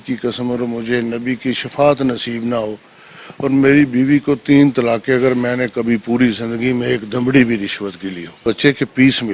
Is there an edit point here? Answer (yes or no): yes